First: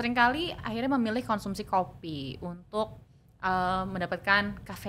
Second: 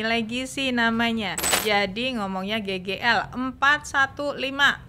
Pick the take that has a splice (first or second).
second